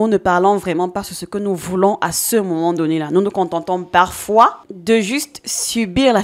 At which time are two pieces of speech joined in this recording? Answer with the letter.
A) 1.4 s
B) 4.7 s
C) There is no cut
B